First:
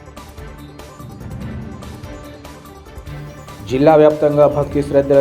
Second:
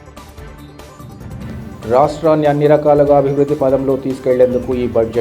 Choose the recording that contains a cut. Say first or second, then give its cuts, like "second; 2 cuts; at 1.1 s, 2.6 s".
first; 1 cut; at 1.4 s